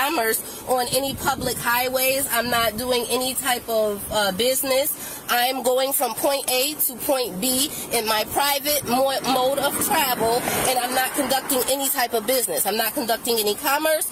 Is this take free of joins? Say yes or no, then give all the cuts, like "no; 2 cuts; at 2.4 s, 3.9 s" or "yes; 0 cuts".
yes; 0 cuts